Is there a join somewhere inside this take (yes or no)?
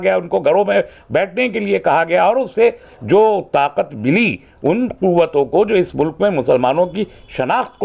no